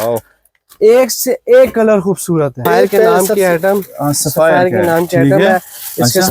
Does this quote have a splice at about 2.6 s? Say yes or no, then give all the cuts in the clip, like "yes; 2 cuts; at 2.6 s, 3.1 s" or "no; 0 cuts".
yes; 1 cut; at 2.6 s